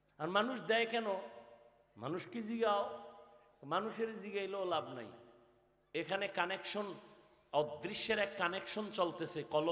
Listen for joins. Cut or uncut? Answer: uncut